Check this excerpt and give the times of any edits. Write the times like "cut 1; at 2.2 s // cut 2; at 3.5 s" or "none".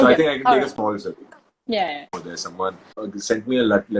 cut 1; at 2.1 s // cut 2; at 3.1 s